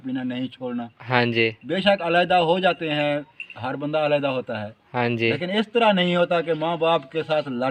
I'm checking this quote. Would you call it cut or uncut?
uncut